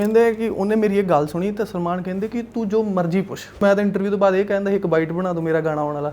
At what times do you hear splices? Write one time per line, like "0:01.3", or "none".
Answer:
0:03.6